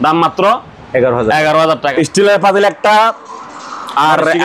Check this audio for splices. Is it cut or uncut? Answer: cut